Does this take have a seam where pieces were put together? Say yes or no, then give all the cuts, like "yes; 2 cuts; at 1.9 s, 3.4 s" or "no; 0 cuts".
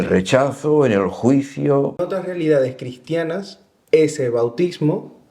yes; 1 cut; at 2.3 s